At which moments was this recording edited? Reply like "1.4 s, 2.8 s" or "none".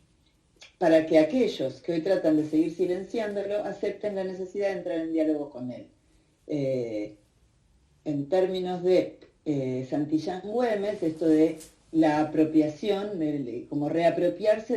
13.3 s